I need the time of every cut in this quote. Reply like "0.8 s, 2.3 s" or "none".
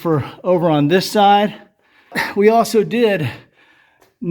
2.2 s